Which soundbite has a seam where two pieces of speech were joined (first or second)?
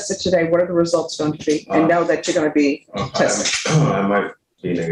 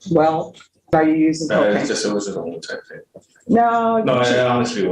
second